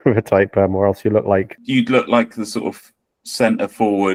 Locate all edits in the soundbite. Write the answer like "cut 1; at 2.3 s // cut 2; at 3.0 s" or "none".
none